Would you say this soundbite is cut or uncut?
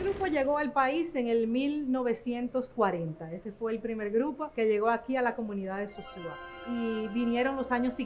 cut